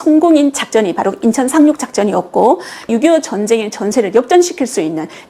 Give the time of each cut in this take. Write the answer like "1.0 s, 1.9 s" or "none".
2.9 s